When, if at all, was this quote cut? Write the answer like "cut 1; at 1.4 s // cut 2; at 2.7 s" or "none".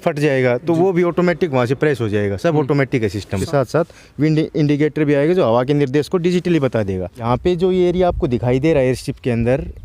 cut 1; at 3.4 s // cut 2; at 7.5 s